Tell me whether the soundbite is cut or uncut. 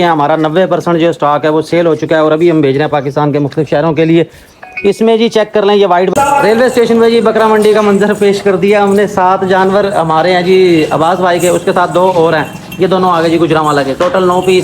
cut